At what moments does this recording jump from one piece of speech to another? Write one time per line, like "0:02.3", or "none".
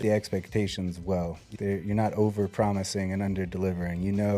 0:01.4